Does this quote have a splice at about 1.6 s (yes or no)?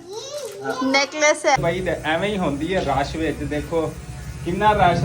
yes